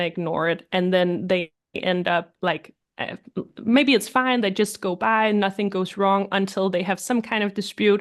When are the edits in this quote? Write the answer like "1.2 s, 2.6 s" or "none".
none